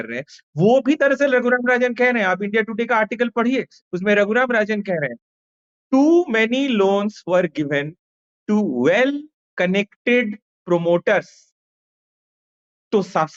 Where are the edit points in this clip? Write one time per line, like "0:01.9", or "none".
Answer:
none